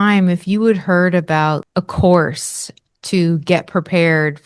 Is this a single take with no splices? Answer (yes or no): no